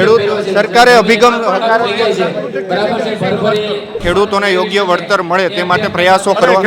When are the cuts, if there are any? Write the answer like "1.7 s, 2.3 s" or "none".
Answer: 4.0 s